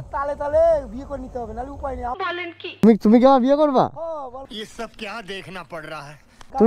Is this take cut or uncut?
uncut